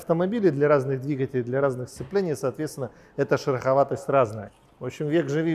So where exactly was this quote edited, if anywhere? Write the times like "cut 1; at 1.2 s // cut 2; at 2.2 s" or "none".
cut 1; at 4.4 s